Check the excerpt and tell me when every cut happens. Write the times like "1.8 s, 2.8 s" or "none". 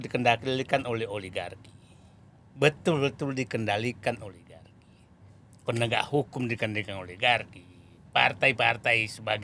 none